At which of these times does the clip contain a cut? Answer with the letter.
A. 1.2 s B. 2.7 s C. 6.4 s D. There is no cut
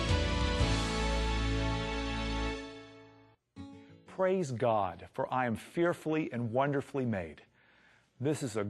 C